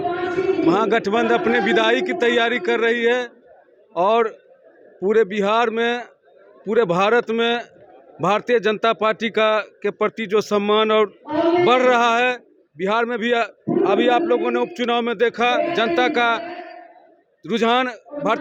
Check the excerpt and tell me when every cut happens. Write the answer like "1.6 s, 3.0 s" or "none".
none